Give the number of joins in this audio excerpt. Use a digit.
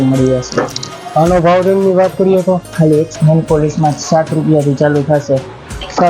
1